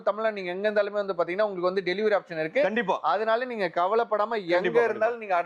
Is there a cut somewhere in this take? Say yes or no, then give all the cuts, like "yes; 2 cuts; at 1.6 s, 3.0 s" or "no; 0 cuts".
no; 0 cuts